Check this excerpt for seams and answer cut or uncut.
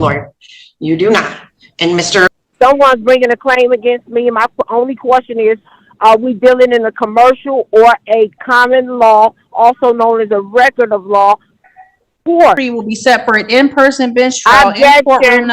cut